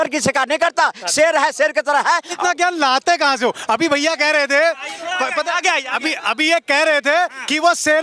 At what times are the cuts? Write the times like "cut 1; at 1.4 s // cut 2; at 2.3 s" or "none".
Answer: cut 1; at 2.4 s

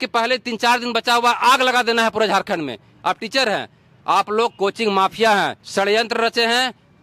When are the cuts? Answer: cut 1; at 5.6 s

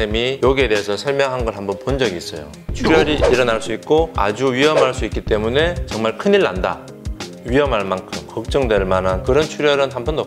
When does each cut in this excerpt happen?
cut 1; at 2.7 s // cut 2; at 6.9 s

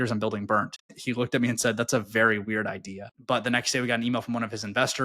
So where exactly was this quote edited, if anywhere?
cut 1; at 1.0 s // cut 2; at 3.1 s

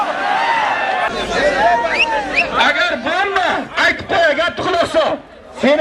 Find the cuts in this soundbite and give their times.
cut 1; at 1.1 s

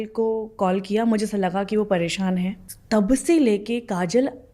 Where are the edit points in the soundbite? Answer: cut 1; at 2.7 s

